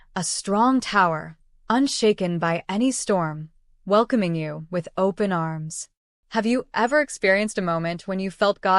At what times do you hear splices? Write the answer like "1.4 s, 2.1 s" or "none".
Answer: 5.6 s, 7.5 s